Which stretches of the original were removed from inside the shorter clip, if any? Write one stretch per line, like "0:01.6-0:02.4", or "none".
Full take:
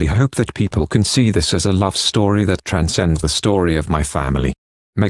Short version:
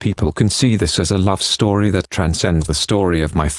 none